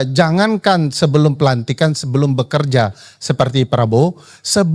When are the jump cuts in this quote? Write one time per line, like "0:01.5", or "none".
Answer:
none